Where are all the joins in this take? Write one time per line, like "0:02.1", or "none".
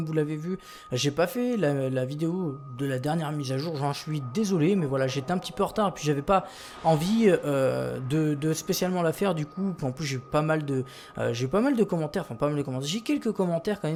none